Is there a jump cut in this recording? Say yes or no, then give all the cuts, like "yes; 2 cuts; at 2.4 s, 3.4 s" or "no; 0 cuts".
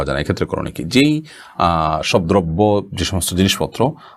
no; 0 cuts